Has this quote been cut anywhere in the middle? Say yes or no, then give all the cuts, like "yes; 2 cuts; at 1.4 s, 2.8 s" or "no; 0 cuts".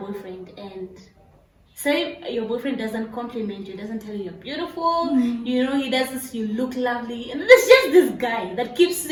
no; 0 cuts